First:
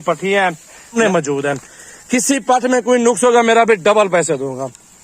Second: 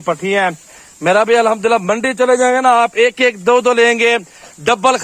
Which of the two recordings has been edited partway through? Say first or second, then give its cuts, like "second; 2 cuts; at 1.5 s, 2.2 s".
first; 1 cut; at 0.9 s